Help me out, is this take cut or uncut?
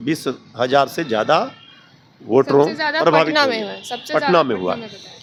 uncut